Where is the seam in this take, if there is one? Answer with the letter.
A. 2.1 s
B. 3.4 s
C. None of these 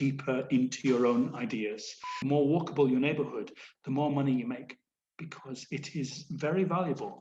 A